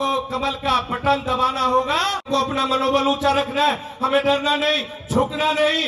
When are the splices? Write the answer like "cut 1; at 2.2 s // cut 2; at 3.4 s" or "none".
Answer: cut 1; at 2.3 s